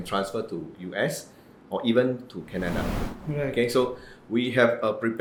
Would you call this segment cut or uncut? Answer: uncut